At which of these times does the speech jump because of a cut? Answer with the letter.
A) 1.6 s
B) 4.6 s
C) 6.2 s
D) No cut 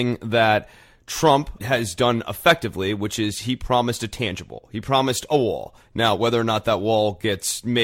A